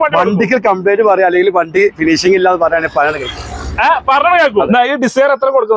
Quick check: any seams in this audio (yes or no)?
yes